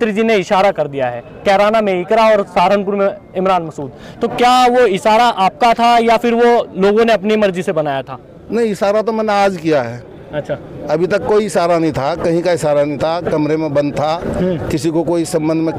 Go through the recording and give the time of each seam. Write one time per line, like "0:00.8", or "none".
none